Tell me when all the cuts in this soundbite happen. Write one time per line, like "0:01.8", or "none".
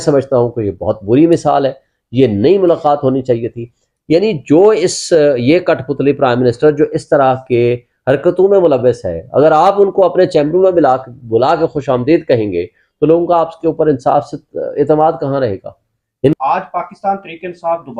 0:16.4